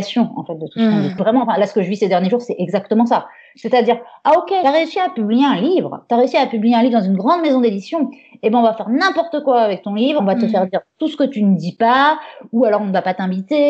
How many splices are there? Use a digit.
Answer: 1